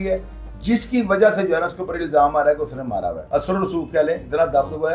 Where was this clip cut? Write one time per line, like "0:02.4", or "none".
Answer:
0:03.2